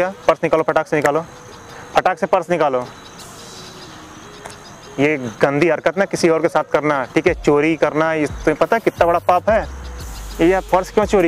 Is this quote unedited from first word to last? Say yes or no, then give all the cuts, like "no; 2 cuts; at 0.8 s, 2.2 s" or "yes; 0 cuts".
yes; 0 cuts